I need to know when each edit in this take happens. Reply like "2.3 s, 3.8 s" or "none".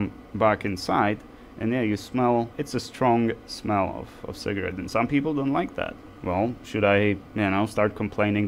2.6 s, 6.1 s, 7.3 s